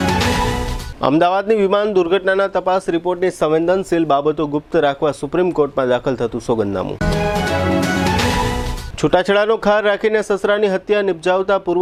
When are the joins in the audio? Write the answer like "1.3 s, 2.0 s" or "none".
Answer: none